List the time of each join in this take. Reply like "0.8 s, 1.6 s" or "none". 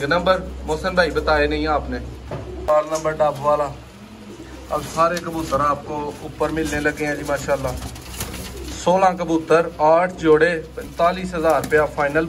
2.7 s